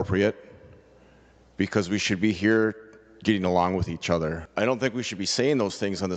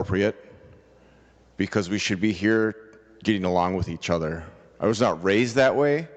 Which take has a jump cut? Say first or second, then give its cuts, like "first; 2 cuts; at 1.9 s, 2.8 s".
first; 1 cut; at 4.4 s